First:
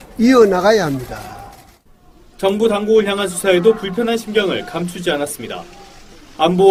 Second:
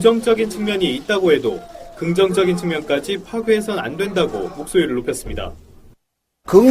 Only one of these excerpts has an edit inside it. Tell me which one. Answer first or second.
second